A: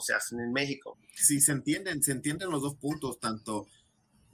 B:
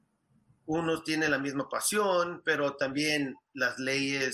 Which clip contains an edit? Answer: A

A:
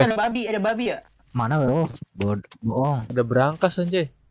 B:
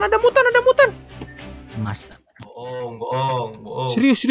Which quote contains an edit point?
A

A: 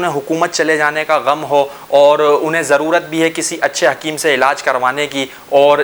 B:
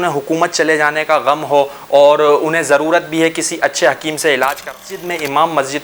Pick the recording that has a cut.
B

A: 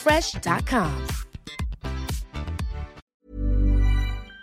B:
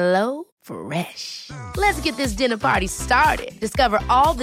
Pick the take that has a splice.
A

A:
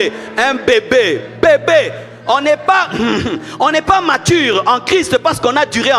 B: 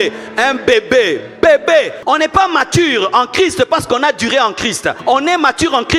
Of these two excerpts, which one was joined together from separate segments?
B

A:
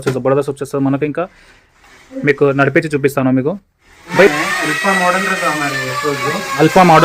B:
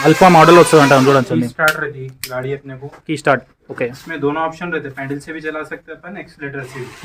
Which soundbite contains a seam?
A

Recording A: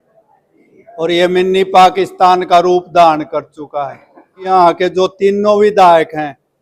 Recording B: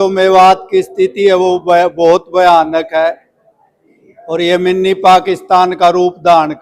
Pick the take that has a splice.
A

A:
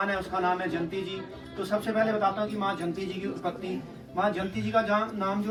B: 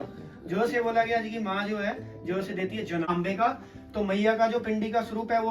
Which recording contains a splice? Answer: B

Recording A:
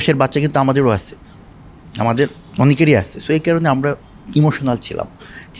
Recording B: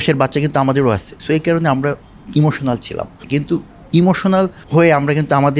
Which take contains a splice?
B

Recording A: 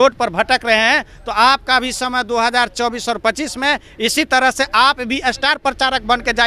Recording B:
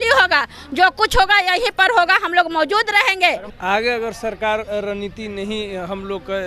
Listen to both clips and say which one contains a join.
B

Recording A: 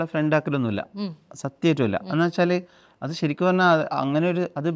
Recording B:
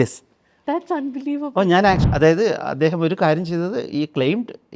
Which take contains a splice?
B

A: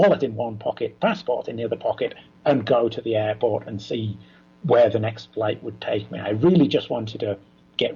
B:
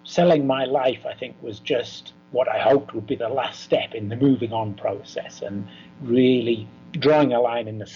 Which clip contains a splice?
B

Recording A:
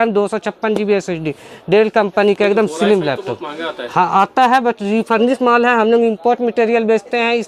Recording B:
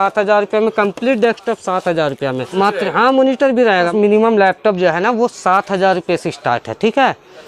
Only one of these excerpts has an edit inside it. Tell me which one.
B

